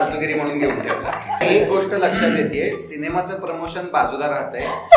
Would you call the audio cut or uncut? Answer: cut